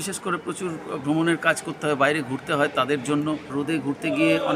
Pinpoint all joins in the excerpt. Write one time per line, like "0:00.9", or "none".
0:03.5